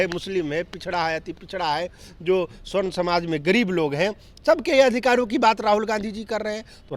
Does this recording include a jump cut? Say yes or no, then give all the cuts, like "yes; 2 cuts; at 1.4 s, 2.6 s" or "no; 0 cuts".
no; 0 cuts